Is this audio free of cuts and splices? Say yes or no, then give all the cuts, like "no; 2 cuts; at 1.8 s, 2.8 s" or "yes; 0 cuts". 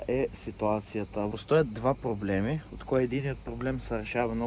yes; 0 cuts